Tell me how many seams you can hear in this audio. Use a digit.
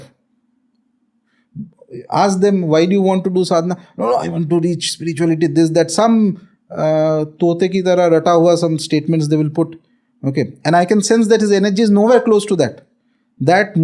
0